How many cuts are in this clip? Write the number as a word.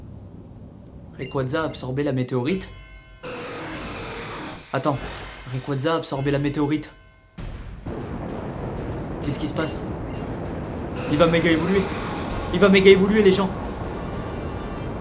one